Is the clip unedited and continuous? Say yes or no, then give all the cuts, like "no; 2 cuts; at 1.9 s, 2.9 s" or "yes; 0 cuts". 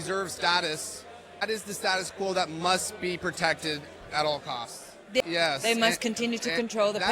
no; 2 cuts; at 1.4 s, 5.2 s